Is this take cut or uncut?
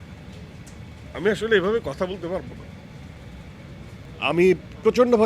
cut